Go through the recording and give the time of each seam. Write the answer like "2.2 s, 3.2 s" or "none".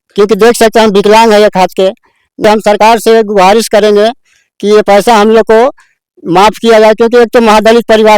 2.4 s